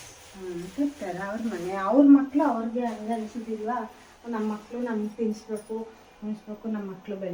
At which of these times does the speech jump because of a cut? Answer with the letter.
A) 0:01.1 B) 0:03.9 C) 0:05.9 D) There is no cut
D